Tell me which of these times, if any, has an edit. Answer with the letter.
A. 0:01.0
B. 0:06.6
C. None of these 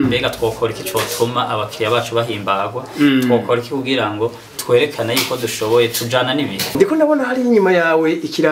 B